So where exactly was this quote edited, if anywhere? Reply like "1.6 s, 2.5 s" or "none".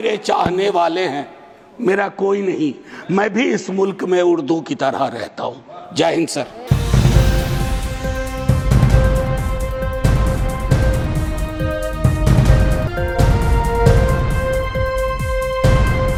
none